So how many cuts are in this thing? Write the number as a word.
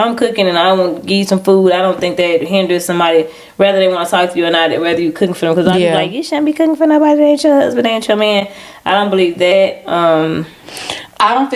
zero